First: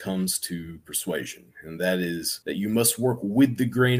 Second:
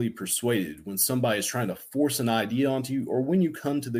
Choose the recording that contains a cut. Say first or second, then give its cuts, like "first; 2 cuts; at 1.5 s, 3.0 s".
first; 1 cut; at 2.3 s